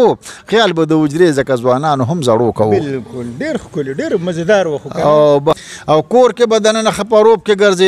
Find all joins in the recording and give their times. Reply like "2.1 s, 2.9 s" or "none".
5.6 s